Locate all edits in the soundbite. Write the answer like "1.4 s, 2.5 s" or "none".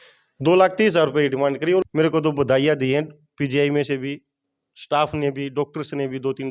1.9 s